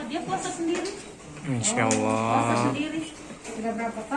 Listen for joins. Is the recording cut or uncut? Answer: uncut